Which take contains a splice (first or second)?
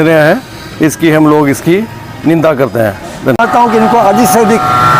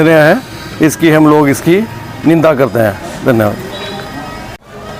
first